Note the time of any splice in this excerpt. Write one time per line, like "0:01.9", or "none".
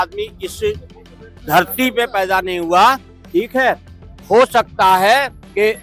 none

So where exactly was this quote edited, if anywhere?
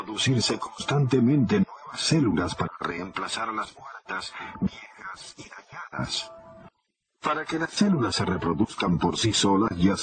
0:04.7

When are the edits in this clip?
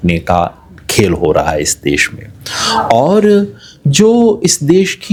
none

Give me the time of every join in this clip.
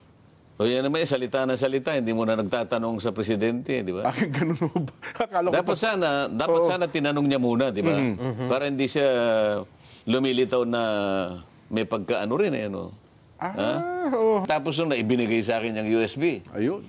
0:14.4

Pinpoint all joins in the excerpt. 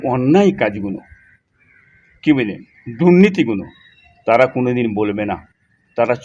none

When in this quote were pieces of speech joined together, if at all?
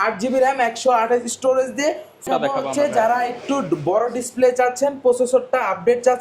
0:02.3

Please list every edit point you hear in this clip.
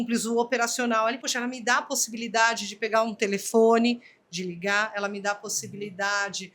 0:01.3

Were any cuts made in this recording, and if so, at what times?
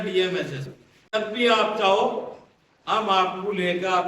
0:01.1

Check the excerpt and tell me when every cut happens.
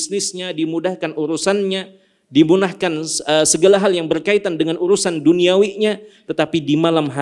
none

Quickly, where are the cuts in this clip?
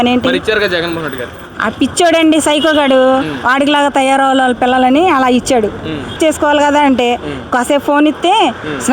0:06.1

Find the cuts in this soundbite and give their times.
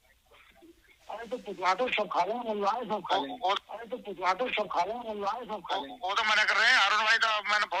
none

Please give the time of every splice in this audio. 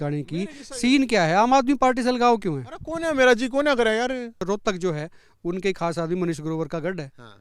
0:04.4

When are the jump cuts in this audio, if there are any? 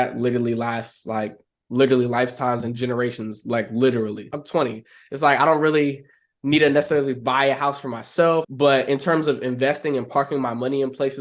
0:04.4
0:08.5

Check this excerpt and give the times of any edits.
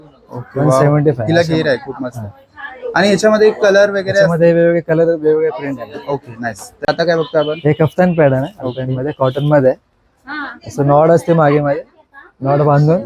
none

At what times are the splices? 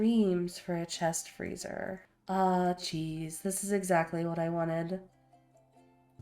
0:02.1

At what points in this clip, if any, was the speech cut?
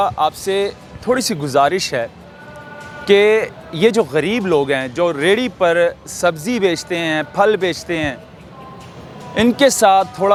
none

